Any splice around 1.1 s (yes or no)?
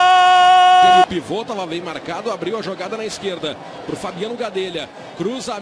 yes